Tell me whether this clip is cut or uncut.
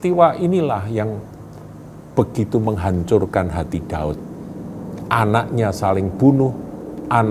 uncut